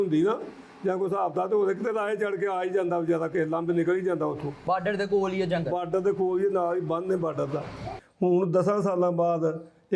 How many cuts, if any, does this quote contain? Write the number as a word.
one